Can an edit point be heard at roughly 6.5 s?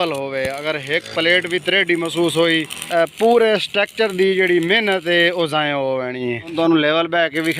yes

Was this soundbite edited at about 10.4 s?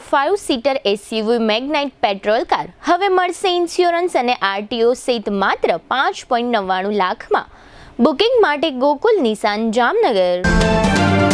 yes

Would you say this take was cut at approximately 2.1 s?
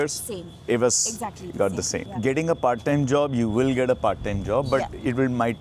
yes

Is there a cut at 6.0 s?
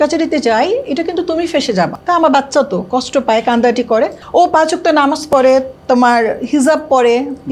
no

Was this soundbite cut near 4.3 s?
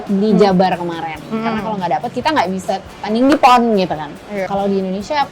yes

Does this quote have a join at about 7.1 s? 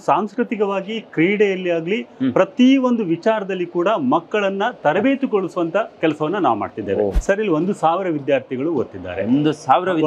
yes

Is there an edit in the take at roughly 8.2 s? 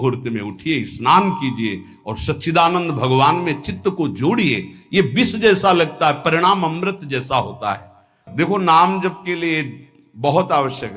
yes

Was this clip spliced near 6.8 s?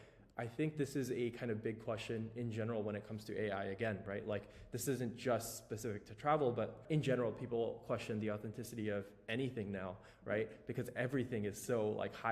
yes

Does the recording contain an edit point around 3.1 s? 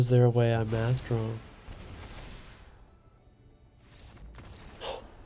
yes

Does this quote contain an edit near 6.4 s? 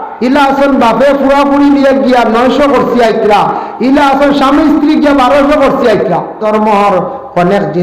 yes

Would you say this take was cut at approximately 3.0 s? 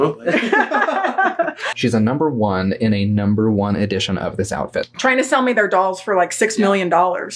no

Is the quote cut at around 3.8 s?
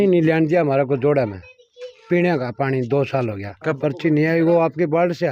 yes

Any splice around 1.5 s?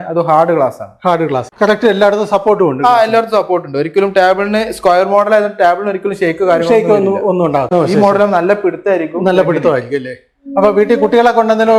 yes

